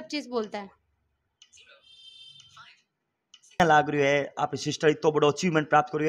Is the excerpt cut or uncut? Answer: cut